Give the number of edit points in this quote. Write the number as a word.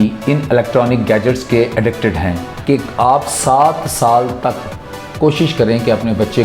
one